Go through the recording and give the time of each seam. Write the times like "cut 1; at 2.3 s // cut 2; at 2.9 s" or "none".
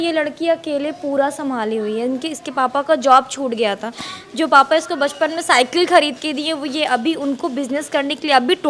none